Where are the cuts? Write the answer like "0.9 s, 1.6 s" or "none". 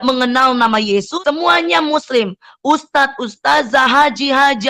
1.1 s